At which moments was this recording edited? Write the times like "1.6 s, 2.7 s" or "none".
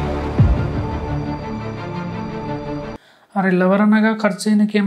2.9 s